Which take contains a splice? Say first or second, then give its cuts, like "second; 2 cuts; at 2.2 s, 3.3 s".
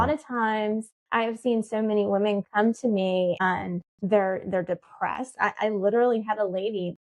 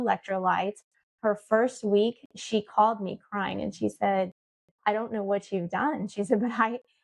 first; 2 cuts; at 1.0 s, 3.4 s